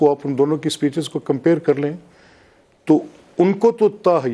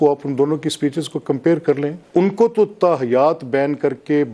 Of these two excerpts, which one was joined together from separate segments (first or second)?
second